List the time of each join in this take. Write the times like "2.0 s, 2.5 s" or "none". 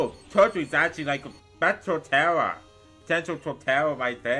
none